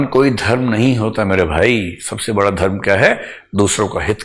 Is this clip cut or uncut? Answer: uncut